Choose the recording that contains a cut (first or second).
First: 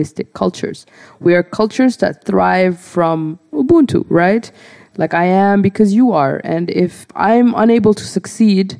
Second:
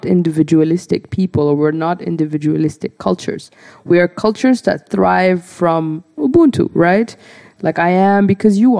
first